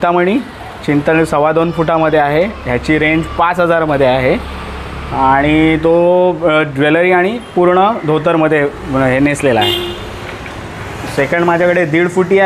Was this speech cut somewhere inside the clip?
no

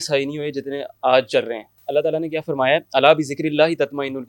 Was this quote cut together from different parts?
yes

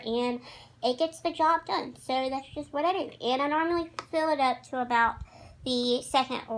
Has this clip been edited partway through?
no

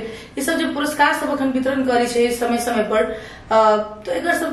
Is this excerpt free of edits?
yes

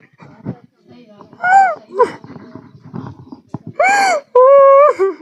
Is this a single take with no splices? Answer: yes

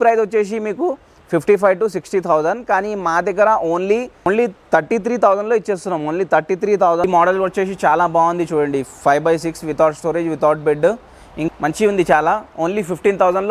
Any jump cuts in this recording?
yes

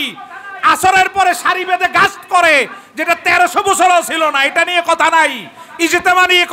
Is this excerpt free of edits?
yes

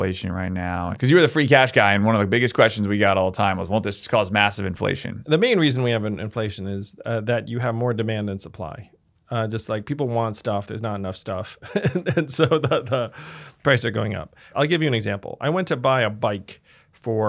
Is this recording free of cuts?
no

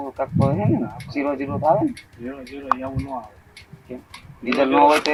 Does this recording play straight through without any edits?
yes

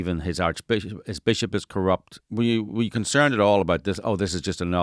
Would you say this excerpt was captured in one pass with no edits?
no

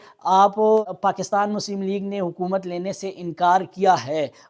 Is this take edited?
yes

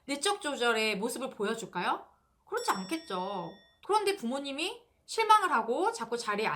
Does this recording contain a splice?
yes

